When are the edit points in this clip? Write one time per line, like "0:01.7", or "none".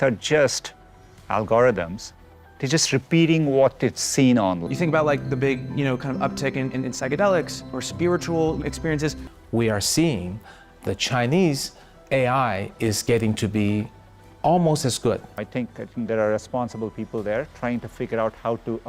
0:04.6
0:09.3
0:15.4